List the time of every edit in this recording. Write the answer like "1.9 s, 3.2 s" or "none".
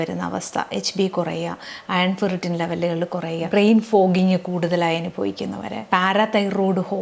3.4 s, 5.8 s